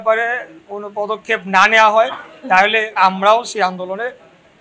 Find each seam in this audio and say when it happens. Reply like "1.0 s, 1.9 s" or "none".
3.0 s